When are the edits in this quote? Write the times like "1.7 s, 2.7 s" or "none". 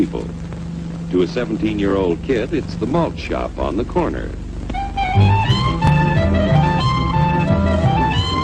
none